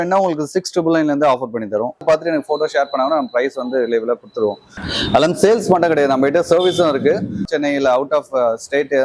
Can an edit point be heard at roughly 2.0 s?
yes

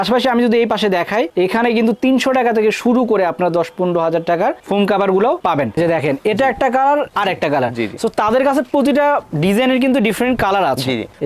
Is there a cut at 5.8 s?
yes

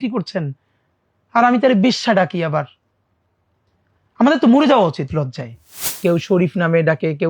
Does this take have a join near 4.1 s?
no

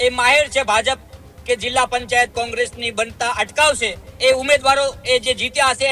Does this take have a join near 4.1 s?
yes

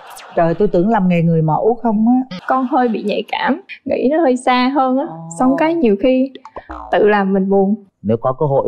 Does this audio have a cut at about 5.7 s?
no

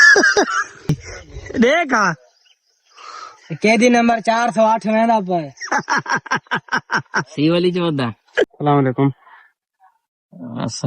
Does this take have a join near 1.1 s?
yes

